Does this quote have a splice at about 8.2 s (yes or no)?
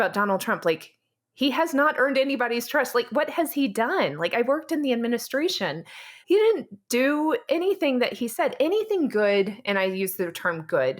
no